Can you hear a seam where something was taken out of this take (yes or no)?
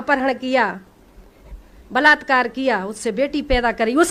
no